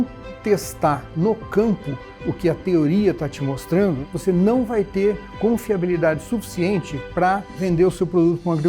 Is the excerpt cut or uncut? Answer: cut